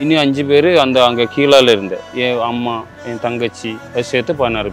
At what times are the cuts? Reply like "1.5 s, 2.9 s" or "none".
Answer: 2.0 s, 3.8 s